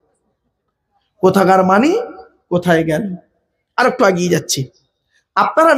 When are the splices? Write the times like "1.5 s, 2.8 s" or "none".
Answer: none

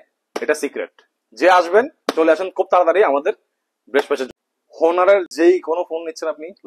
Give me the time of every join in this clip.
4.3 s

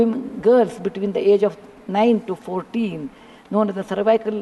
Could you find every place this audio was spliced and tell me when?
none

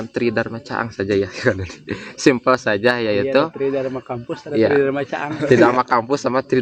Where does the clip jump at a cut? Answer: none

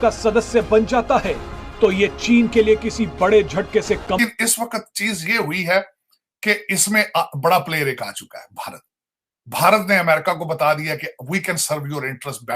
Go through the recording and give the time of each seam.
4.3 s

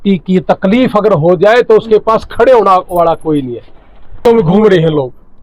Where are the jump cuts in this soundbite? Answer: 4.2 s

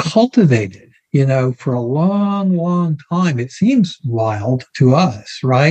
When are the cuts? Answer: none

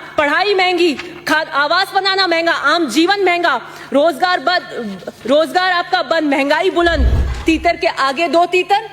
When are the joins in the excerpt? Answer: 7.3 s

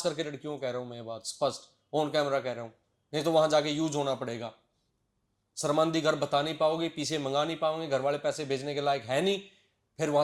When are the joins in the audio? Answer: none

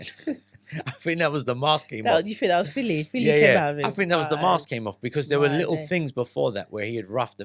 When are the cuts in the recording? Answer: none

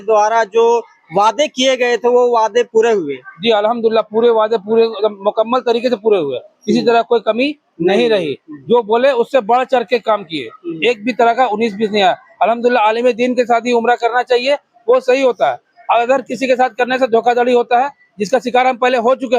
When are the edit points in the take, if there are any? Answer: none

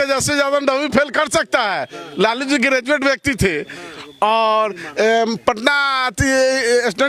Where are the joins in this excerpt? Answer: none

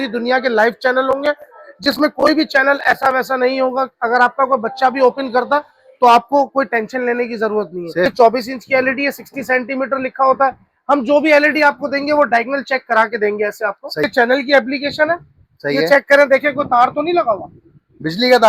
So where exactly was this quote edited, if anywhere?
8.1 s, 14.0 s

